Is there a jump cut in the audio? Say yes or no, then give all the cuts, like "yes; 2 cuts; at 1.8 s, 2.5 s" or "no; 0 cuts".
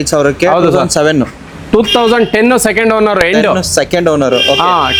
no; 0 cuts